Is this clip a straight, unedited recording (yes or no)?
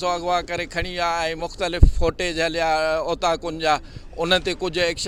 yes